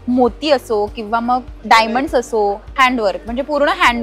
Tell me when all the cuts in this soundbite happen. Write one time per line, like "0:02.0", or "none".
0:02.6